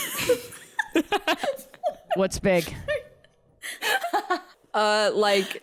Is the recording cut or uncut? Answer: cut